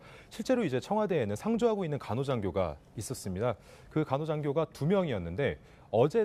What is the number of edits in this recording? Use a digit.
0